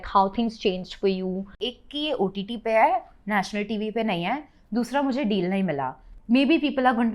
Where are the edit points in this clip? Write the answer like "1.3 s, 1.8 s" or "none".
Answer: 1.6 s, 6.1 s